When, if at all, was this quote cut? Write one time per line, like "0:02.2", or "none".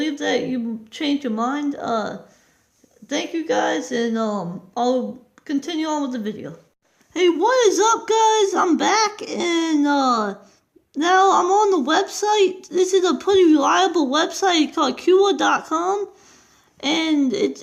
none